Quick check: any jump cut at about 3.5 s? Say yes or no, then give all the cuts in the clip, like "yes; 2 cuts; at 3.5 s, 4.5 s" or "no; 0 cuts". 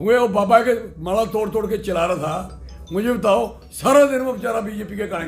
no; 0 cuts